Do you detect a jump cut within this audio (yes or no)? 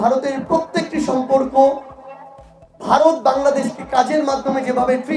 no